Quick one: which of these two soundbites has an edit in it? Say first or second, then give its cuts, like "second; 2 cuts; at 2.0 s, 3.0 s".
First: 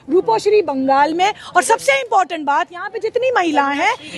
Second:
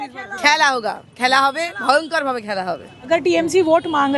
second; 1 cut; at 3.1 s